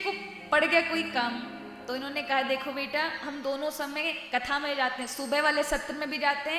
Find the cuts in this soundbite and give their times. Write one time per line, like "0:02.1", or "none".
none